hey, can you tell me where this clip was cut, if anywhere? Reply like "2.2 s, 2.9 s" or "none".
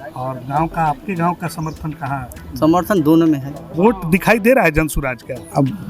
3.7 s